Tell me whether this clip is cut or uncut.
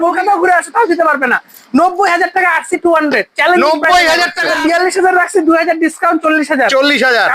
cut